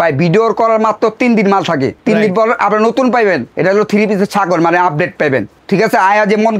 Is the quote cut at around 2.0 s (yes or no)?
yes